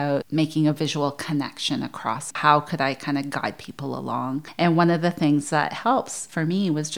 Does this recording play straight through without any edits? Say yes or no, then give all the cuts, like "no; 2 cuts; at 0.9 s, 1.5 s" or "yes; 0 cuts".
no; 1 cut; at 2.4 s